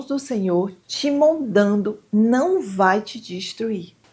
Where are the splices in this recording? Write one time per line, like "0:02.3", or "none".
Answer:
none

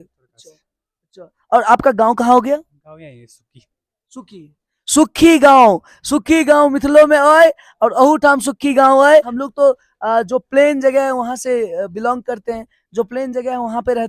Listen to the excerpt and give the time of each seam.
0:09.4

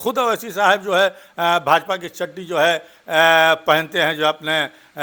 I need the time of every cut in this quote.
none

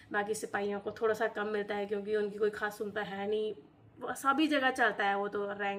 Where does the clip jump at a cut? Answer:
none

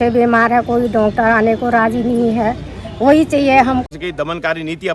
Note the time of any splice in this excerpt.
0:03.8

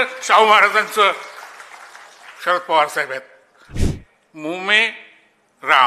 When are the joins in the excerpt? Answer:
0:03.8

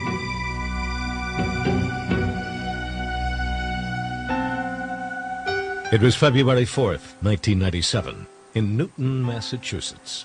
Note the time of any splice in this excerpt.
0:03.6

